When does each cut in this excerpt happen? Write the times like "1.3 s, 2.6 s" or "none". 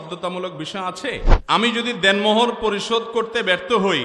1.3 s

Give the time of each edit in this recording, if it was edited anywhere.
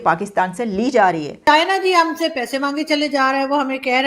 1.4 s

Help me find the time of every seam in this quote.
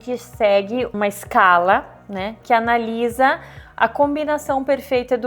0.9 s

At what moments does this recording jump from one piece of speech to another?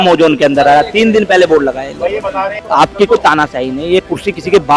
2.6 s

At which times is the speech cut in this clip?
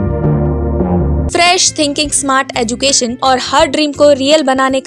1.2 s, 3.2 s

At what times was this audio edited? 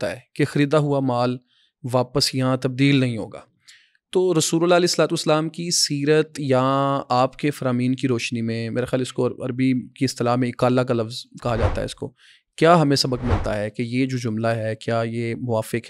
none

